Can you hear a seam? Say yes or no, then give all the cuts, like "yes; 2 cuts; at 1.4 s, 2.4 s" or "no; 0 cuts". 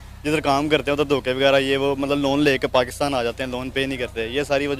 no; 0 cuts